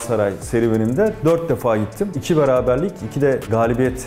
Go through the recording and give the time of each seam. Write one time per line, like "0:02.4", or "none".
none